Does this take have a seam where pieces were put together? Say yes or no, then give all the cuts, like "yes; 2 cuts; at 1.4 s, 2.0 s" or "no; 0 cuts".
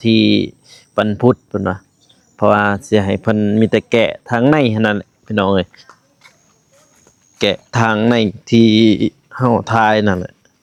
no; 0 cuts